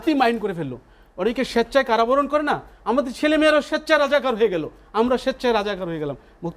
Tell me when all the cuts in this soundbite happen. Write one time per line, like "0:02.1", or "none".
none